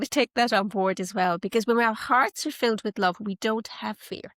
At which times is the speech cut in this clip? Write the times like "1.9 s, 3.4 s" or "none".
none